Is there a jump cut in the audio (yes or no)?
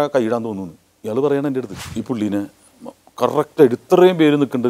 yes